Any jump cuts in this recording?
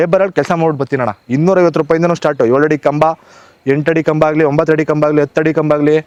no; 0 cuts

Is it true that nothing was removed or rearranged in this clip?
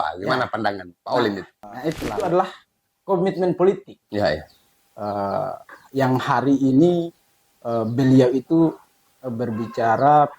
no; 1 cut; at 2.1 s

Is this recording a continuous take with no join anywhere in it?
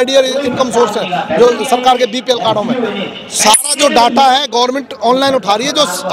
yes; 0 cuts

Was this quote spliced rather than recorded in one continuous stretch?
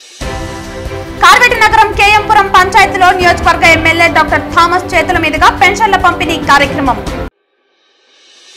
yes; 1 cut; at 1.0 s

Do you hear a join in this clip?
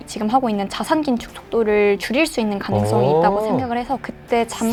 no; 0 cuts

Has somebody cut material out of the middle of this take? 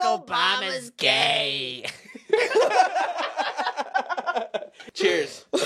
yes; 1 cut; at 4.7 s

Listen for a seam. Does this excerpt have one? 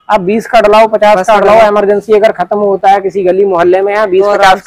no; 0 cuts

